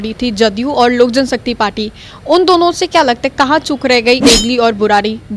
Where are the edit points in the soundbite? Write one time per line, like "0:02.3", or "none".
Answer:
0:04.2